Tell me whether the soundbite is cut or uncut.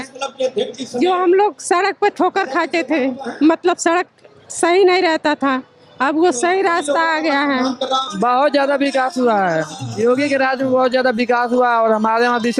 cut